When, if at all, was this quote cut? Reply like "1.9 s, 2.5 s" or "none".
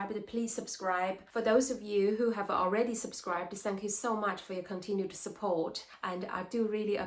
1.2 s, 5.9 s